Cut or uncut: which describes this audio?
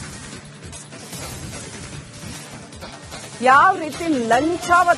uncut